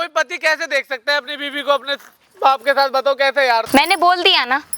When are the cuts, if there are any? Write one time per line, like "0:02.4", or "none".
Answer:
0:03.7